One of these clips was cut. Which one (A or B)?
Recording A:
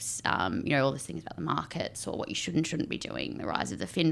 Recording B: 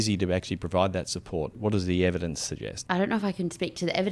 B